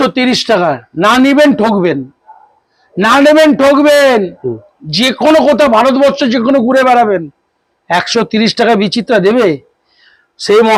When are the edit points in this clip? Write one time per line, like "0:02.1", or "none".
none

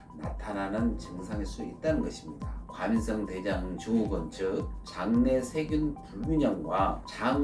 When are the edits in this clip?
0:02.6

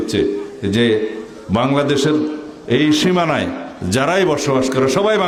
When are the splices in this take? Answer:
none

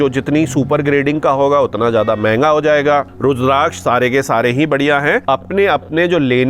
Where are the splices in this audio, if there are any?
0:03.1
0:05.2

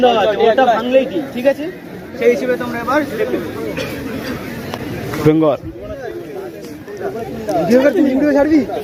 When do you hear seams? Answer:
none

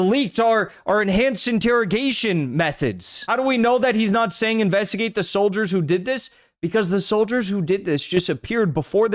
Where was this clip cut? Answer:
none

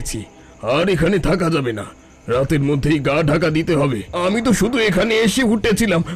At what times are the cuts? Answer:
0:04.1

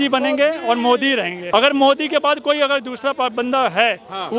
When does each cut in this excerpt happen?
0:01.4

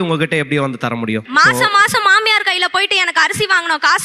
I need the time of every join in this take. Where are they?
none

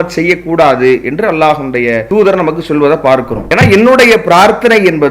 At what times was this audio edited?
0:02.0
0:03.4

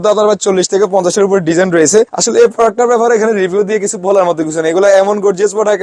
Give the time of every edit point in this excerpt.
0:02.2

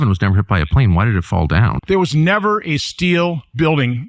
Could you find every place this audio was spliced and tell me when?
0:01.8

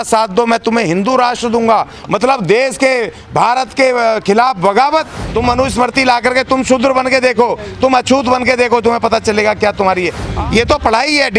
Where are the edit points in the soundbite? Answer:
0:05.2
0:10.2

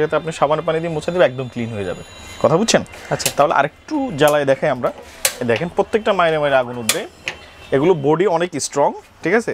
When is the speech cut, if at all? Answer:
none

